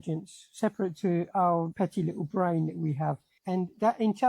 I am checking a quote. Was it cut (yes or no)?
yes